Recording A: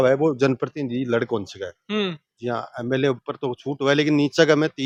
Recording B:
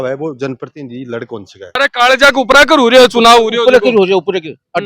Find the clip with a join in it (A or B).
B